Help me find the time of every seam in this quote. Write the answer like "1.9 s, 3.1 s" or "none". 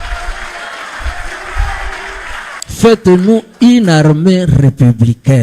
2.5 s

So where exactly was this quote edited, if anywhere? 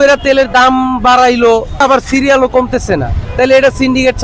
1.8 s, 3.2 s

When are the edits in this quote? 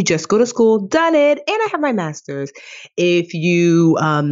none

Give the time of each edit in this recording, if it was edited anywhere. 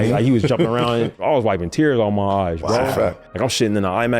1.2 s

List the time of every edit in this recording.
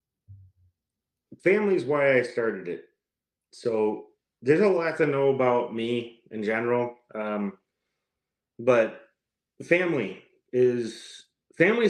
none

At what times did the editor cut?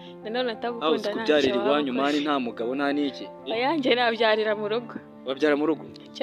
none

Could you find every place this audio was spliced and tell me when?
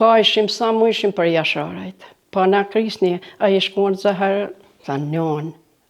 4.7 s

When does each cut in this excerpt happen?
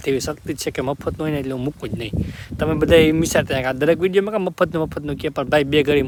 none

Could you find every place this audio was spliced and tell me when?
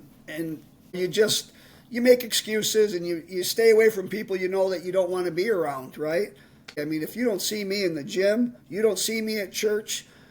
1.0 s, 6.8 s

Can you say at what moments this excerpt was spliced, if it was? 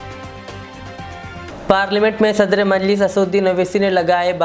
1.5 s

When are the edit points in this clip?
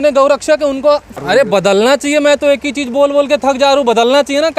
1.1 s

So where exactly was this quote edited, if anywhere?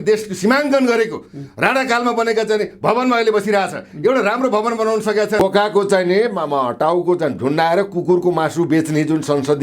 5.4 s

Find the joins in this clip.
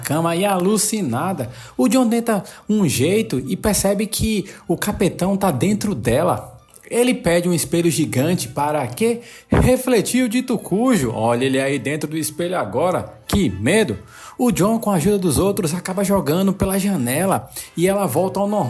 none

